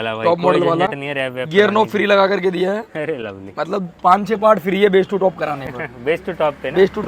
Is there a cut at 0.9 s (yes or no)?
no